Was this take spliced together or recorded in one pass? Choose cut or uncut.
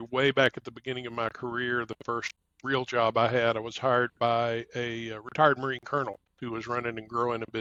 uncut